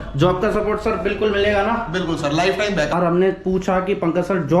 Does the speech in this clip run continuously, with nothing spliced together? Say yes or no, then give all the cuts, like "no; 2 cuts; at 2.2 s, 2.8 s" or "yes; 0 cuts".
no; 1 cut; at 2.9 s